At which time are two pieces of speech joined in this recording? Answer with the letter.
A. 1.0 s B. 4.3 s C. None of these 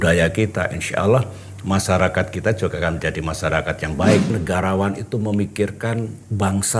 B